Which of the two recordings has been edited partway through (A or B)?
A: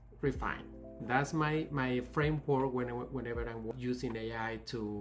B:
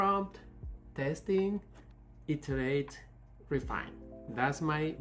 A